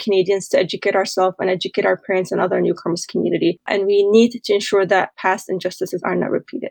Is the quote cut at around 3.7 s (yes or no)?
yes